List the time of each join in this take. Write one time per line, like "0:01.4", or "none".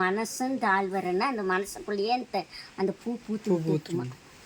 none